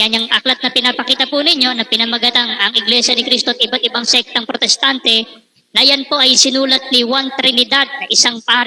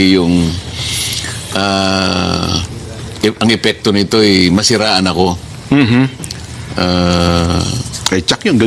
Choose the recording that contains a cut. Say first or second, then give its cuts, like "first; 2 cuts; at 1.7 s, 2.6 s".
second; 1 cut; at 7.4 s